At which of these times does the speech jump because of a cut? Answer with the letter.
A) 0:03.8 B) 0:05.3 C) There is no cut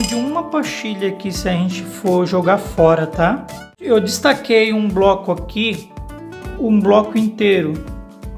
A